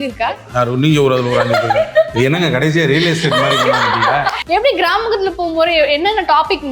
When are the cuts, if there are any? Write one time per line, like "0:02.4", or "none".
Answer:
0:04.4